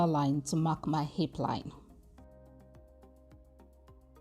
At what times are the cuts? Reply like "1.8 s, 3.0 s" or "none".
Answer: 1.8 s